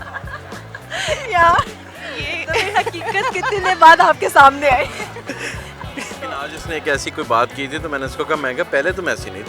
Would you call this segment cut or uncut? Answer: cut